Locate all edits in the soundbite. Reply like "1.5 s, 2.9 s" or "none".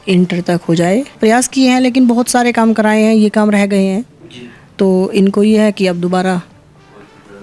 none